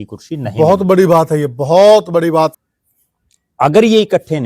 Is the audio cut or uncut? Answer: cut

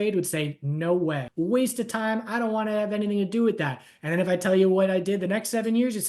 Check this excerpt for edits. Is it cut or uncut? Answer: cut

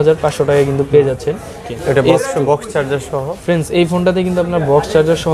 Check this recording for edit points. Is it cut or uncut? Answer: cut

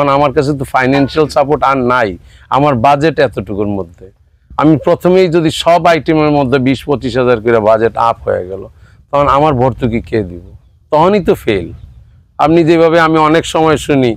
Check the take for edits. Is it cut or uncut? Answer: uncut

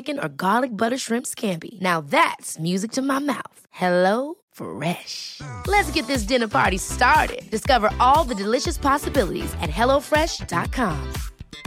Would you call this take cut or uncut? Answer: uncut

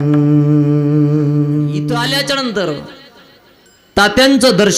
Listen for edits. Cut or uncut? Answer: cut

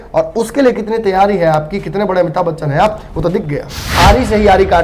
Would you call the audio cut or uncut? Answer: cut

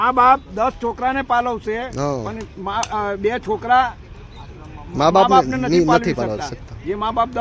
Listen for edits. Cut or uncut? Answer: uncut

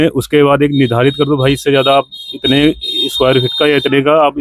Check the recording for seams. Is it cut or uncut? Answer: uncut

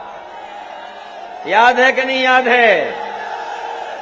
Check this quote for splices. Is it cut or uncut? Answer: uncut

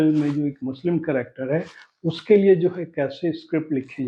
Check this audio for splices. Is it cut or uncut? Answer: uncut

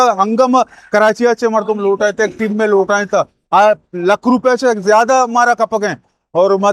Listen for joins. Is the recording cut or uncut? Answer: uncut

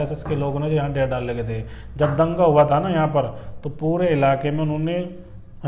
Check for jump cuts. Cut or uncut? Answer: uncut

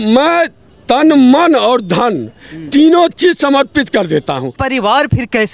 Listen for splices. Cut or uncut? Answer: cut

